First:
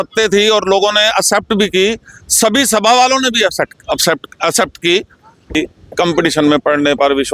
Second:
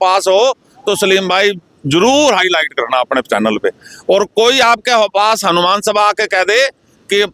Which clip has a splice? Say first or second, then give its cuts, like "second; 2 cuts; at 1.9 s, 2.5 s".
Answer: first; 1 cut; at 5.5 s